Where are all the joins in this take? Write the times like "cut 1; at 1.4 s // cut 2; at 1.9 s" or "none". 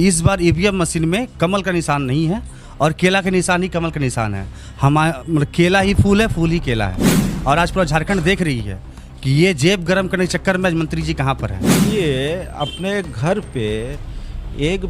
cut 1; at 7.3 s // cut 2; at 11.8 s